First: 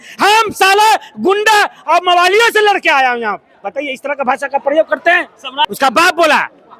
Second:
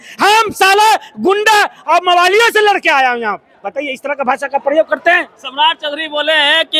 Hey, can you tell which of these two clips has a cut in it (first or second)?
first